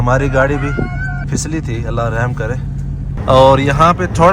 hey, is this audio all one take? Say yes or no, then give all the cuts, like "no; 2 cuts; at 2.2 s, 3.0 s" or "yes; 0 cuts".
no; 2 cuts; at 1.2 s, 3.2 s